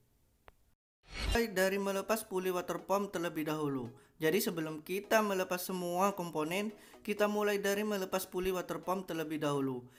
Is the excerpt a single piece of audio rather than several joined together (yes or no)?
yes